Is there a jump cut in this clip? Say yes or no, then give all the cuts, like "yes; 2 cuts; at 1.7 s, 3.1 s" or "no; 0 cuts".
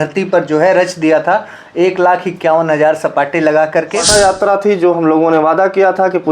yes; 1 cut; at 4.0 s